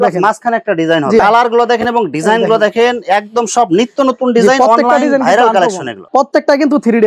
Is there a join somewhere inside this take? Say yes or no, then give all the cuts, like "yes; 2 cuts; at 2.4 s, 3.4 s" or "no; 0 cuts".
yes; 2 cuts; at 1.2 s, 5.9 s